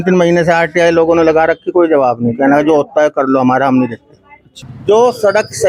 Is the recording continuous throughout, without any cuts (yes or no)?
yes